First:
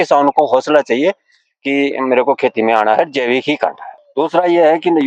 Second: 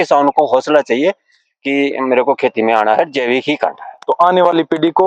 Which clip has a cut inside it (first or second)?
first